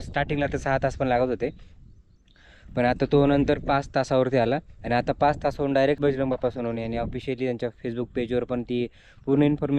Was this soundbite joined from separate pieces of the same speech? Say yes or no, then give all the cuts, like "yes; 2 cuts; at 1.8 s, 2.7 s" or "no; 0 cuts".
yes; 1 cut; at 6.0 s